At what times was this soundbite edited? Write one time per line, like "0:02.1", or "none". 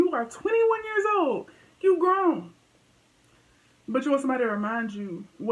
none